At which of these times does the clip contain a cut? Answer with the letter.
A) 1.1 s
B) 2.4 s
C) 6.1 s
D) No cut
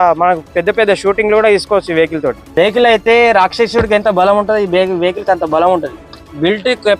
B